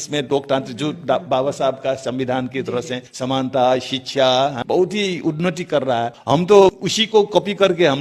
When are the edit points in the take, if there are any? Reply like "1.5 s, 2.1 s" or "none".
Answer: 3.0 s, 4.6 s, 6.2 s, 6.9 s